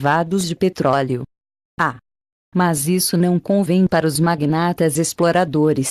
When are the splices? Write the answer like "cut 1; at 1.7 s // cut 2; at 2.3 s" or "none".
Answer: cut 1; at 1.9 s